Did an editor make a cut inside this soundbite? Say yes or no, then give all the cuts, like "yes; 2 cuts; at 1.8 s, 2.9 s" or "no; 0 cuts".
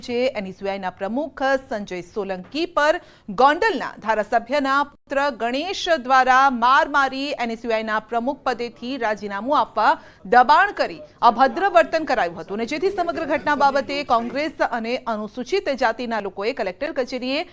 yes; 1 cut; at 9.5 s